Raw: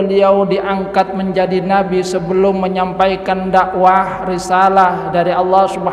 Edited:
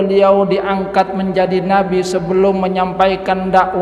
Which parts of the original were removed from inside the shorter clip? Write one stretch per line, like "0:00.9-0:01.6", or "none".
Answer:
none